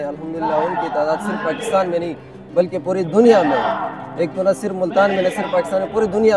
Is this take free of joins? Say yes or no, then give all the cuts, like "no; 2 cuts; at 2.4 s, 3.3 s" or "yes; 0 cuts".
yes; 0 cuts